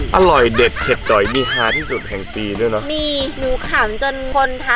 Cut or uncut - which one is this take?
uncut